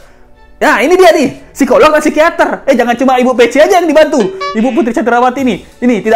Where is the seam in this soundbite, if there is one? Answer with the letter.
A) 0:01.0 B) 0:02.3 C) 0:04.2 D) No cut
D